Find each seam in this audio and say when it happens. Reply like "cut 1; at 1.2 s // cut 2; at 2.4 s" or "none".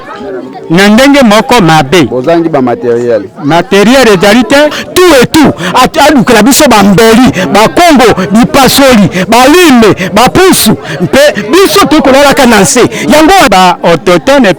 cut 1; at 4.8 s // cut 2; at 13.5 s